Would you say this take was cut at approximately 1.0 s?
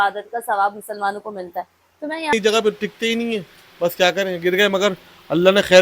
no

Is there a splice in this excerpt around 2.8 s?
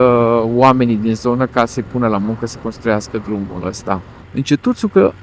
no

